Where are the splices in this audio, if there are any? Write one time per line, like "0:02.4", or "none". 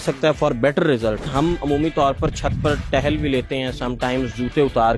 0:01.3

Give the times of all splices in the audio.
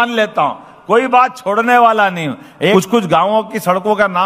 0:02.7

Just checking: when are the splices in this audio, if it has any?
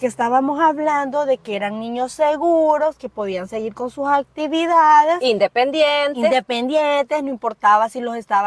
none

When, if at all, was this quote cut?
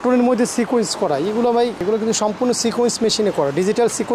0:01.8

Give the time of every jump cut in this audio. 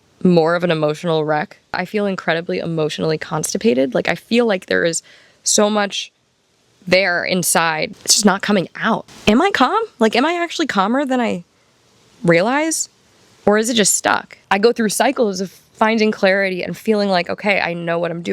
0:01.8
0:07.9
0:09.1
0:14.3

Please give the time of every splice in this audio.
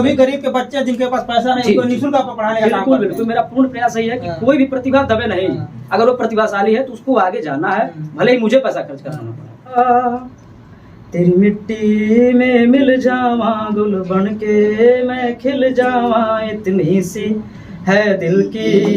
0:09.8

